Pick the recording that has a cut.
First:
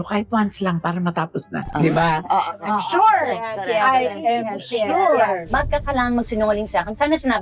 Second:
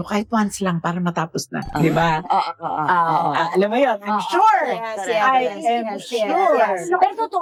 first; 2 cuts; at 2.6 s, 5.5 s

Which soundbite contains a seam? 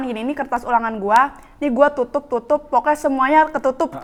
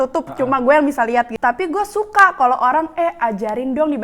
second; 1 cut; at 1.3 s

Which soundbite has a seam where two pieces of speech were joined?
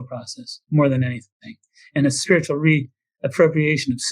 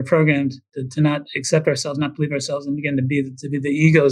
first; 1 cut; at 2.2 s

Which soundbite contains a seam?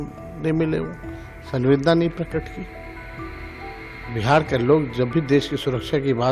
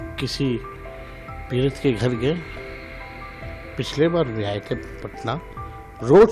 first; 2 cuts; at 2.7 s, 4.1 s

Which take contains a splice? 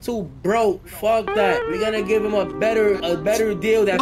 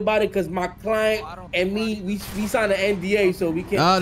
first; 2 cuts; at 1.6 s, 3.0 s

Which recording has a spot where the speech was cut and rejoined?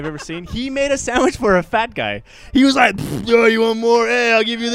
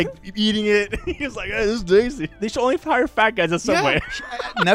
second; 1 cut; at 2.3 s

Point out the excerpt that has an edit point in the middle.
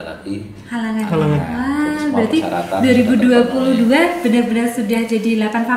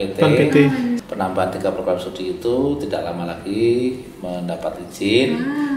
second; 1 cut; at 1.0 s

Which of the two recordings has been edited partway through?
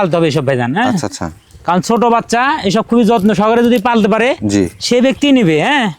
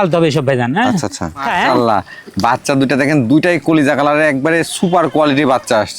second; 1 cut; at 1.5 s

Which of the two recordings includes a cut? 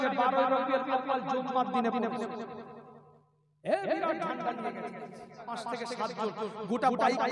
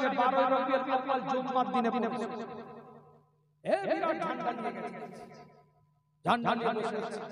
first; 1 cut; at 5.5 s

